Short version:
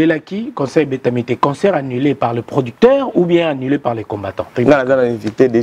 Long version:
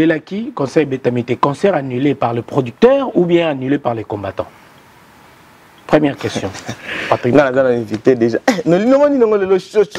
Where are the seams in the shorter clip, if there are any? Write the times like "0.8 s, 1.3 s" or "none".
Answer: 4.5 s